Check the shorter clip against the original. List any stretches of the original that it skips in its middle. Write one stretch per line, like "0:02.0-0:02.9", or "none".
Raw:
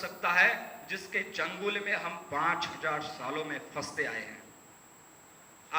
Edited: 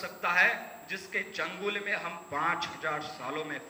none